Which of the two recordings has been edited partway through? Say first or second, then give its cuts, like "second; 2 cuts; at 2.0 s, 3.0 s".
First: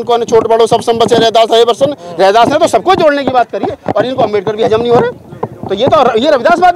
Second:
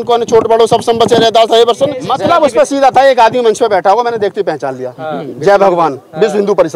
second; 1 cut; at 2.0 s